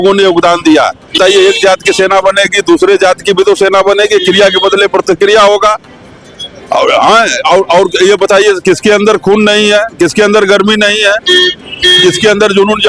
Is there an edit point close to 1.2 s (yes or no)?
yes